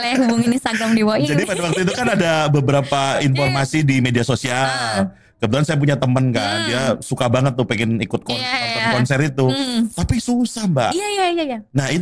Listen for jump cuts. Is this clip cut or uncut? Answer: uncut